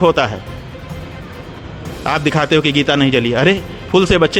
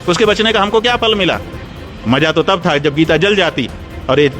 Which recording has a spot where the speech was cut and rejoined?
second; 1 cut; at 1.5 s

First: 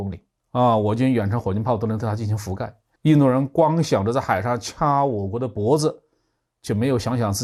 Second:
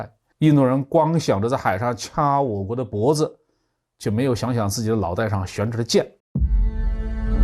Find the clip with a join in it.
second; 1 cut; at 6.2 s

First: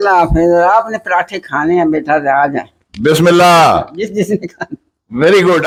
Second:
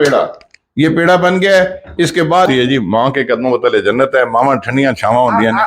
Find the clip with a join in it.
second; 1 cut; at 2.5 s

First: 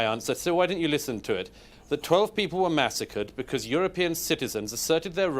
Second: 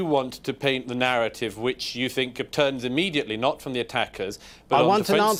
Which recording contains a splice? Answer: first; 1 cut; at 1.7 s

